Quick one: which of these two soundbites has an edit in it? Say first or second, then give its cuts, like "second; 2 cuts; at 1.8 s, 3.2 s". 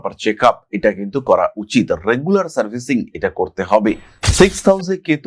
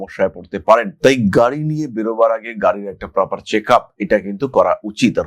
first; 1 cut; at 4.2 s